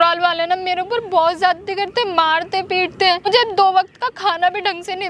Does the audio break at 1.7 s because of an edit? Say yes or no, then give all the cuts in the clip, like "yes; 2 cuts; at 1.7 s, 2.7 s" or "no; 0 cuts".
no; 1 cut; at 3.3 s